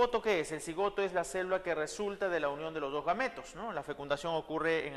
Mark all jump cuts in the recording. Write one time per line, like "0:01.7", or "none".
0:02.8